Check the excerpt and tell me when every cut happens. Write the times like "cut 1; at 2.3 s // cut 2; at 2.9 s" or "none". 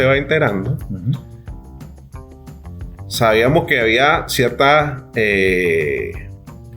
none